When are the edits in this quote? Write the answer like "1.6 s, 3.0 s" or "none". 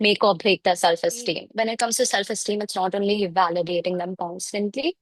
1.5 s